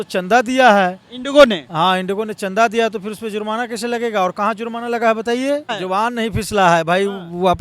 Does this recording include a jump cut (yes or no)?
yes